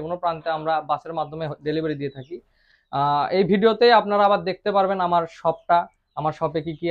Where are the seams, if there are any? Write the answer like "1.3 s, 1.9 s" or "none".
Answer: none